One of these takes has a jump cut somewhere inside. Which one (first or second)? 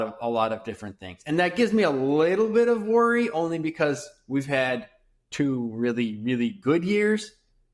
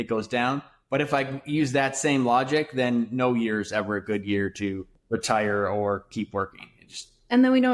second